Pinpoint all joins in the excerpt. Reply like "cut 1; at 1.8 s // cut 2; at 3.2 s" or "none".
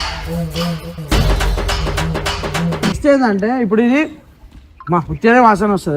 cut 1; at 3.0 s